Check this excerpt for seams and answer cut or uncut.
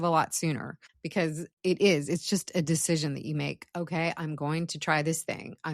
cut